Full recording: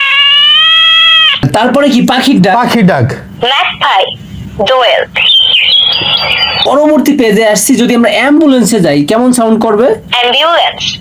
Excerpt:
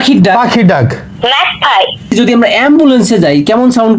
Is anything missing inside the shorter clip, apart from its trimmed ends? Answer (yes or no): yes